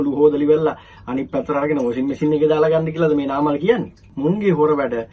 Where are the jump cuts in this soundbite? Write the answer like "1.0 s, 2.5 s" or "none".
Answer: 4.0 s